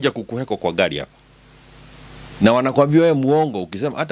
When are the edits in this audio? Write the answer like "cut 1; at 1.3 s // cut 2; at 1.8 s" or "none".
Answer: none